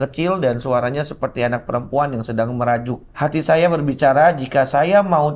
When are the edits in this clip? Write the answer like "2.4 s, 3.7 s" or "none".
3.0 s